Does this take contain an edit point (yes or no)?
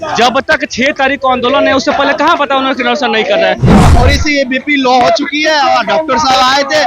yes